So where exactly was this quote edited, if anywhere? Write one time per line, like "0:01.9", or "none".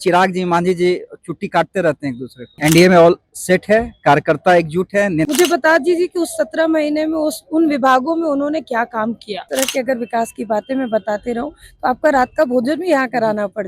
0:02.5
0:05.3
0:09.5